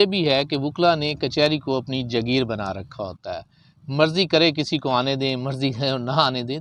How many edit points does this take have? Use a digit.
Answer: 0